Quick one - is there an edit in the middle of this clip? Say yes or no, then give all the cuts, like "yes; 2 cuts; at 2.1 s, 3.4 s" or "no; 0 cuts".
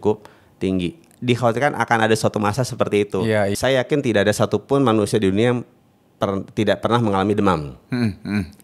yes; 1 cut; at 3.5 s